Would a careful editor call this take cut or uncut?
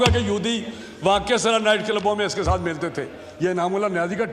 uncut